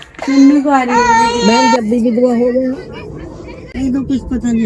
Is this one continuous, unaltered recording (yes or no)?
no